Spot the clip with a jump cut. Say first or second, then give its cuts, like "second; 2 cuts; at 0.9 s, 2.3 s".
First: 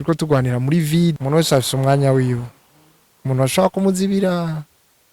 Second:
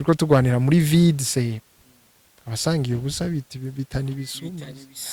first; 1 cut; at 1.2 s